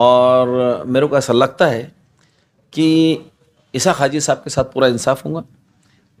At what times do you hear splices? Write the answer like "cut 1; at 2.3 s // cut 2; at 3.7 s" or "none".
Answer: none